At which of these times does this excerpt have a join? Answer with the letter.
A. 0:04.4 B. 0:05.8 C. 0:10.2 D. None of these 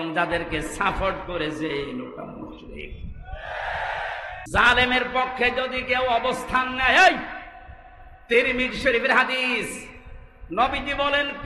A